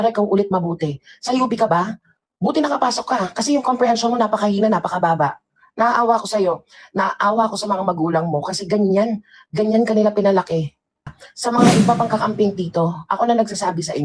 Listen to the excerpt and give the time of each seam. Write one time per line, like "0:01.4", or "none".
0:11.2